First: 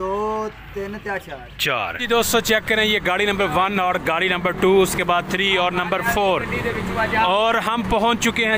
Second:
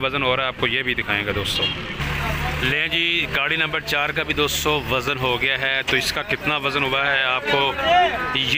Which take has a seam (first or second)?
first